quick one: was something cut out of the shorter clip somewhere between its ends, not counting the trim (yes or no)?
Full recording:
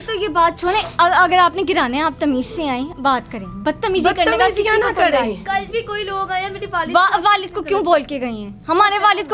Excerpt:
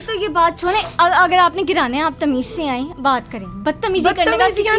no